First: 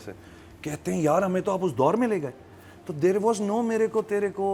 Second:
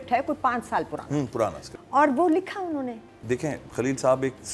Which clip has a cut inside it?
second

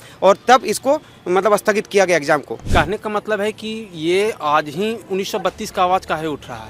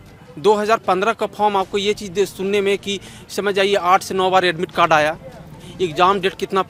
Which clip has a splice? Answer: first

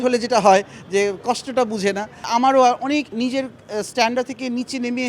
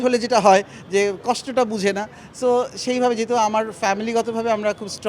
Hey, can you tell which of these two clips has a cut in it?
first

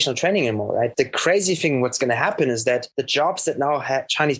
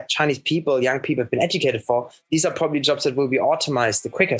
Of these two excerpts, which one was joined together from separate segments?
first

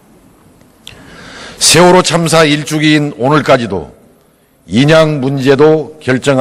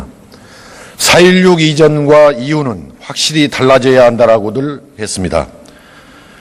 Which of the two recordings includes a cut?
first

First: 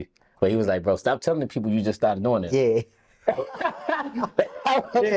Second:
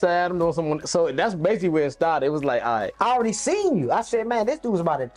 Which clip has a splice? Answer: second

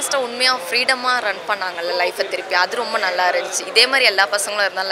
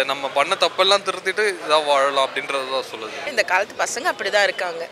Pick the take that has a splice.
second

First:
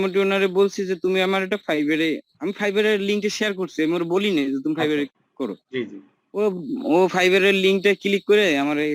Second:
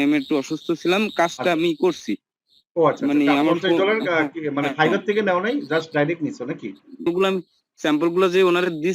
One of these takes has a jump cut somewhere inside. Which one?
second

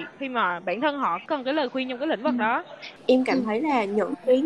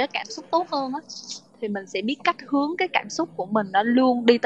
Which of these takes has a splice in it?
first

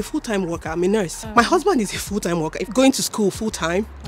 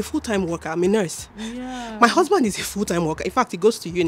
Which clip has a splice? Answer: first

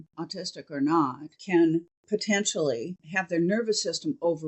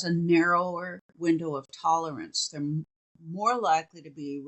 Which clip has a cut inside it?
first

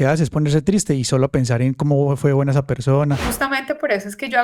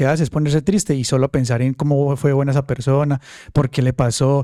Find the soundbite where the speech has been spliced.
first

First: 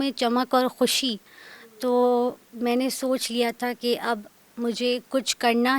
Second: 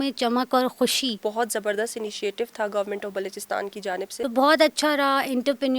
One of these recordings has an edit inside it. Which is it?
second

